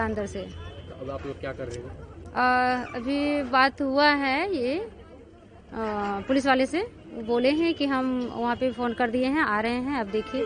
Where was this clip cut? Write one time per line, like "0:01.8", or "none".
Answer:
none